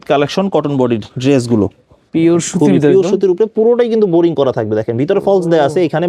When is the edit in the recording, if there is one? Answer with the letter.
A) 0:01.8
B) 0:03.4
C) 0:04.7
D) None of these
D